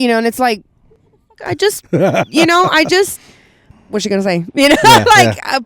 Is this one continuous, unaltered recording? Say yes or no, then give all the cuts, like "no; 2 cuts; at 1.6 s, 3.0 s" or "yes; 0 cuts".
no; 1 cut; at 3.7 s